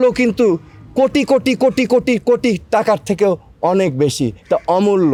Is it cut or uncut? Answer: uncut